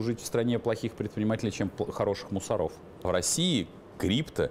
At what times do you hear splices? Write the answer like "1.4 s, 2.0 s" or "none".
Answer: 3.1 s